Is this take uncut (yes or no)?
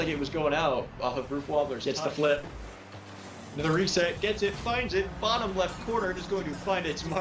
no